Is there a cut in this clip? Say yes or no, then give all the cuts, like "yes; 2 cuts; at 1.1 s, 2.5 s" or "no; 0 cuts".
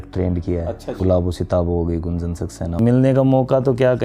yes; 2 cuts; at 1.0 s, 2.7 s